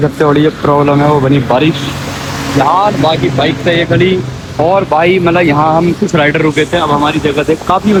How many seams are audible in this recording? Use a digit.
0